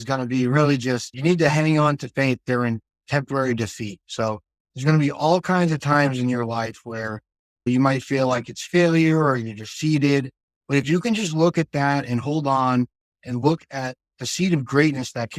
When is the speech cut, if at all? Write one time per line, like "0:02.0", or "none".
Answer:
none